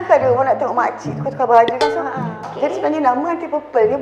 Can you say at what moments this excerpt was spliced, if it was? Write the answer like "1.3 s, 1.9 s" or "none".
2.4 s